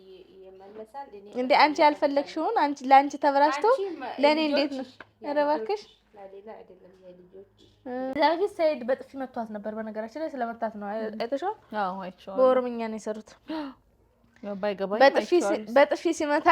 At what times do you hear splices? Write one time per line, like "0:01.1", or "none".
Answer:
0:08.2